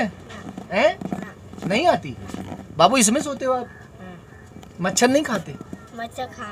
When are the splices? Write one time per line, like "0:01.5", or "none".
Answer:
none